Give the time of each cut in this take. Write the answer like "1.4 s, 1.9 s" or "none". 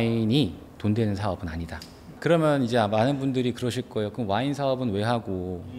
none